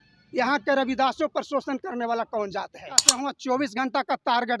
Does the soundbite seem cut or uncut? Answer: cut